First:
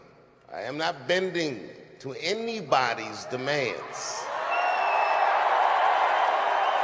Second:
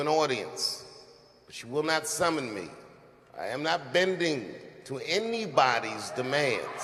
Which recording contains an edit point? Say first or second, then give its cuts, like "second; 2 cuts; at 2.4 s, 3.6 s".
first; 1 cut; at 5.9 s